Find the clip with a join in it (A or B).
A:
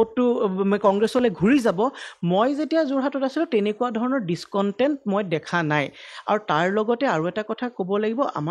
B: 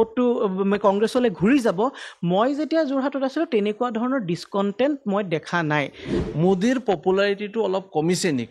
B